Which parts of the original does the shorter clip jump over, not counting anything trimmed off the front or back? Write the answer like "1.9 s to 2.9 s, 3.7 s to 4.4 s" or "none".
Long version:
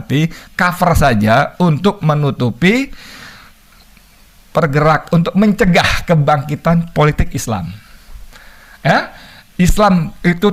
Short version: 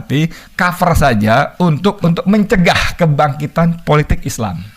2.0 s to 5.1 s